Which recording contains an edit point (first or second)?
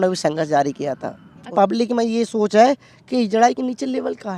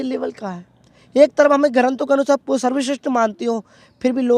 first